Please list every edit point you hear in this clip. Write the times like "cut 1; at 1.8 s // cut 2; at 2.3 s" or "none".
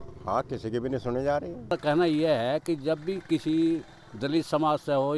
cut 1; at 1.7 s